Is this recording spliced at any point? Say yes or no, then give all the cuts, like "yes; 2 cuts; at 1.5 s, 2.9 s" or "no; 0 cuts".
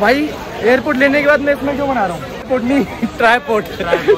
yes; 1 cut; at 2.5 s